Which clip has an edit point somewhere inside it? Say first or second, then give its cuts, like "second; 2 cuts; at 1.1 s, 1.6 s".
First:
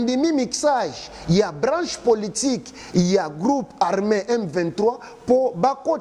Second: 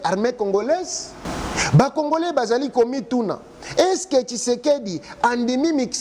second; 1 cut; at 1.3 s